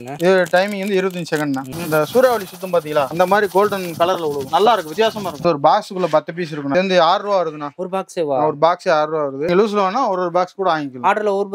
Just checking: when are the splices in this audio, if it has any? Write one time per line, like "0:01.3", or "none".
0:01.7
0:05.4
0:06.7
0:09.4